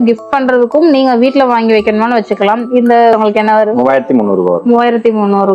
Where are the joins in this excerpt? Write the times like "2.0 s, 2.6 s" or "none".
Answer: 3.1 s